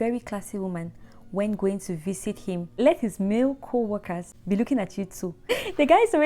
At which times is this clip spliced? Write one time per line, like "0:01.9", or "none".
0:02.7
0:04.3
0:05.5